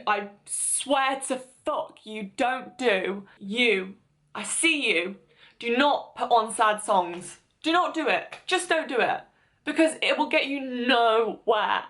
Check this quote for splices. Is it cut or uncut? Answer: cut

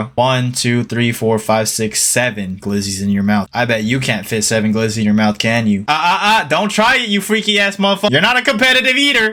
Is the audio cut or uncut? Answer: uncut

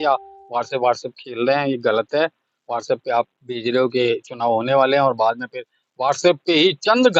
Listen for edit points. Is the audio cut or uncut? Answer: uncut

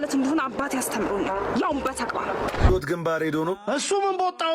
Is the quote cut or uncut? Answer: cut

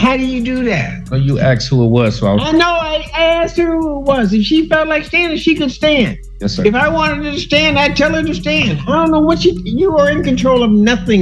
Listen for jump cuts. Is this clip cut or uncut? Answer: uncut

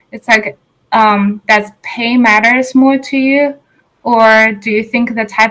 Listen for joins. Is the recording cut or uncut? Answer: uncut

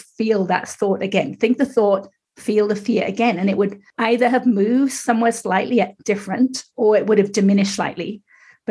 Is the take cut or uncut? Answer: cut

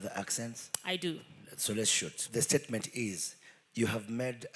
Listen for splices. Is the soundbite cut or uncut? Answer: cut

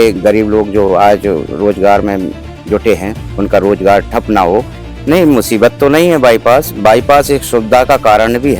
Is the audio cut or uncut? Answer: cut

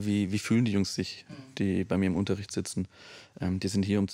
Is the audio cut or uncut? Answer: uncut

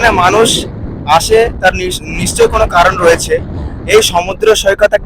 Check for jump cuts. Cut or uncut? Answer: uncut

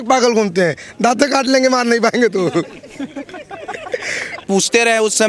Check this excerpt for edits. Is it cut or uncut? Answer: cut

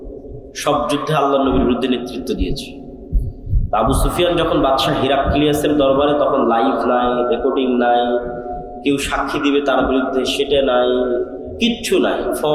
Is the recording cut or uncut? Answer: uncut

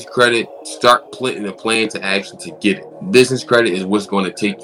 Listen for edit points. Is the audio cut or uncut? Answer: cut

